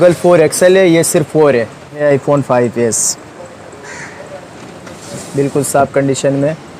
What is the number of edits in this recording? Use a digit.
1